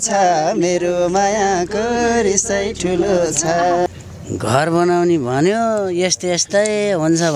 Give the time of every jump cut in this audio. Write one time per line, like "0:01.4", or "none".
0:03.9